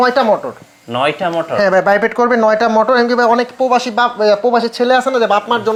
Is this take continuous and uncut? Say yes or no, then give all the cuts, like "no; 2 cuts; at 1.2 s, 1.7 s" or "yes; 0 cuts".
yes; 0 cuts